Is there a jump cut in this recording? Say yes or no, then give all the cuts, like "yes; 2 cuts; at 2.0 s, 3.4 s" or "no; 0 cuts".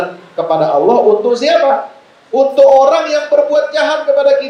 no; 0 cuts